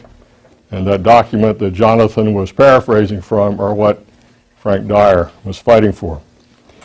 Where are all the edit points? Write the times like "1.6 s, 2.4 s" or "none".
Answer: none